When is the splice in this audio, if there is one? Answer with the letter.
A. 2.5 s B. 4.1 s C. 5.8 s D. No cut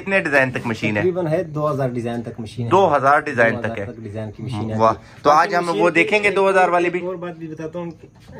D